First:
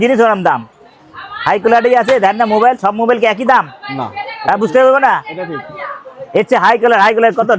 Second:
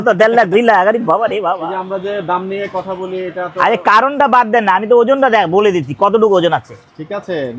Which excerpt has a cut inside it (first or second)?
second